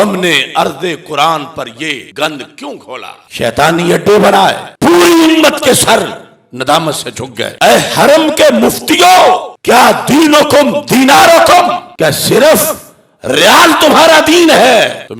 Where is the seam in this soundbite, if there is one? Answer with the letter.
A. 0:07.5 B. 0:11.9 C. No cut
A